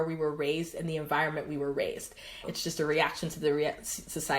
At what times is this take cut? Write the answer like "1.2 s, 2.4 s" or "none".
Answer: 2.4 s

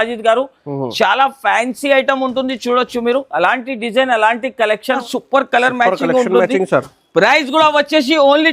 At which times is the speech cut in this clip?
5.0 s

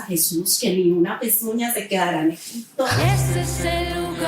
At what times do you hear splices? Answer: 3.0 s

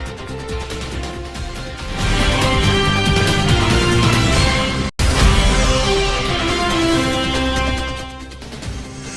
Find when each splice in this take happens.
8.1 s

